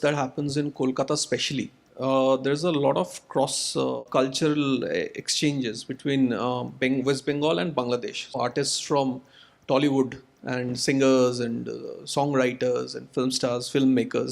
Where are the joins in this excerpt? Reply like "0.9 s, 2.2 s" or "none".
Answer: 4.0 s, 8.4 s, 13.0 s